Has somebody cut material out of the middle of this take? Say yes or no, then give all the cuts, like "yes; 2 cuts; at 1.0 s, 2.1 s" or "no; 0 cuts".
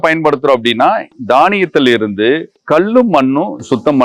no; 0 cuts